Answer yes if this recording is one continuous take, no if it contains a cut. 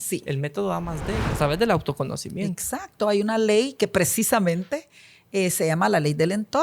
no